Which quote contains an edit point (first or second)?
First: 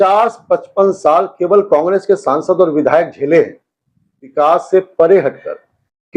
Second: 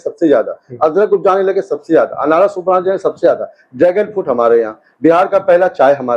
first